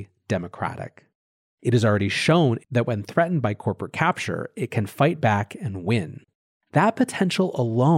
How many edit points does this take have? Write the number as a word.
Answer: one